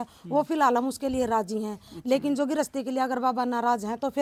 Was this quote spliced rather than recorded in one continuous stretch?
no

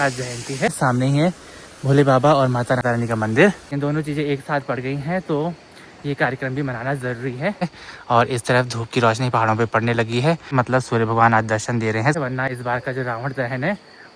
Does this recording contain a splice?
yes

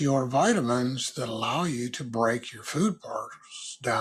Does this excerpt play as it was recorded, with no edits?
yes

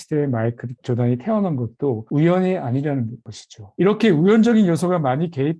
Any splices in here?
no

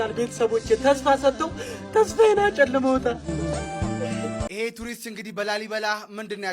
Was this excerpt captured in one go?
no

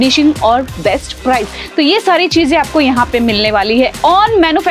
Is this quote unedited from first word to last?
yes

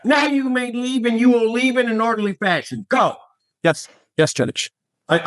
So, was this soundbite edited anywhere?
no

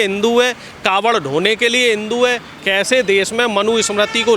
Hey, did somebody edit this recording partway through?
yes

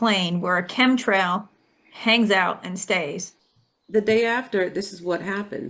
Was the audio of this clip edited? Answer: yes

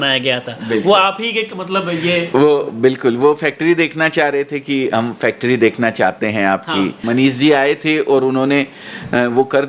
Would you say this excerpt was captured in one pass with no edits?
no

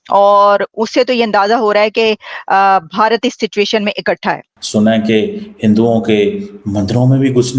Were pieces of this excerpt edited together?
yes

